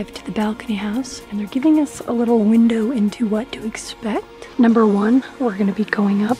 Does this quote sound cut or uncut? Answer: cut